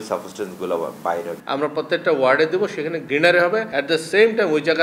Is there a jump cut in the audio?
yes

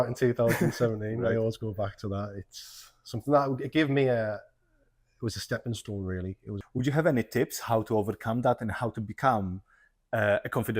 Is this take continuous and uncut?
no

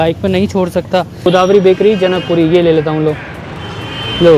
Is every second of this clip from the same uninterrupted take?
no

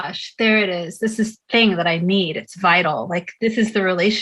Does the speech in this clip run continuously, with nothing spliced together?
no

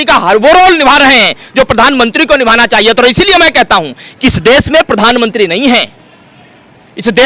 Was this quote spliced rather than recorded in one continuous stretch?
no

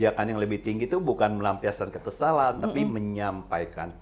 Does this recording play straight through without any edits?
yes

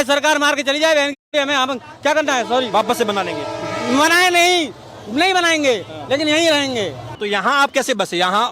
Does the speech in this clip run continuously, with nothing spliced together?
no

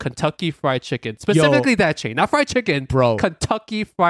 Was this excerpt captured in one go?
yes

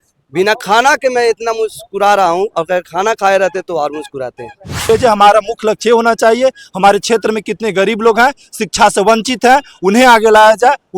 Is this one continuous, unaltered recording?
no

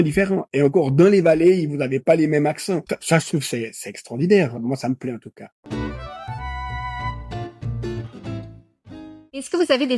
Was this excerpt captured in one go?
yes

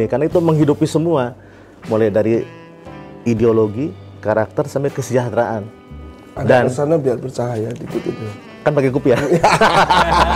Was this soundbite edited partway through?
no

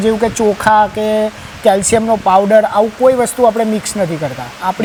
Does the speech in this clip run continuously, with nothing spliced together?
yes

